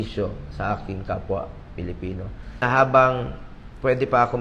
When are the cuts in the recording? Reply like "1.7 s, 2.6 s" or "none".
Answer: 2.6 s